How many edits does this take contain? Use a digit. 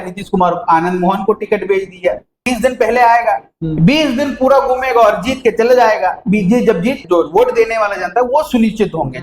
2